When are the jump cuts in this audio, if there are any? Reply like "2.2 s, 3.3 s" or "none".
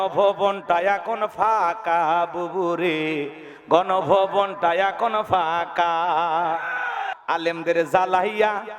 7.1 s

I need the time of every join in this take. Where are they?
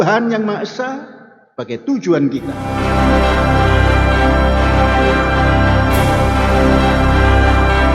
2.6 s

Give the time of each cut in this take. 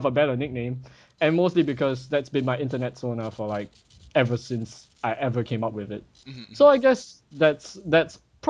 2.5 s

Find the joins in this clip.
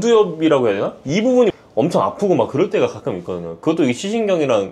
none

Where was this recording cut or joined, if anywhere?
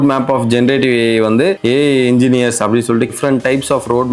3.1 s

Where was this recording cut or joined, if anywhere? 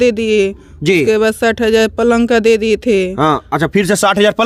none

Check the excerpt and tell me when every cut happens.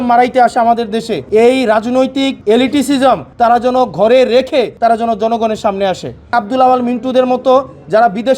1.2 s, 2.4 s, 3.3 s, 4.7 s, 6.3 s

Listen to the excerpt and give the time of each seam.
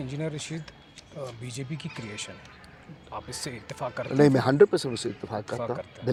none

